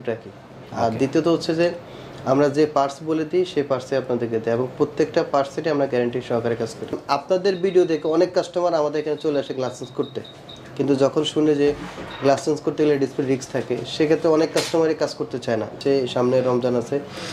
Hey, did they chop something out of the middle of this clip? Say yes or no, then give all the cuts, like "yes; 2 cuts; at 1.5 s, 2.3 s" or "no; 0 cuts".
yes; 2 cuts; at 7.0 s, 15.8 s